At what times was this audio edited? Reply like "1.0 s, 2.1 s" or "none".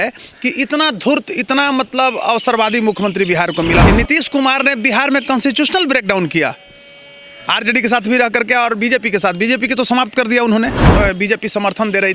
3.8 s, 10.9 s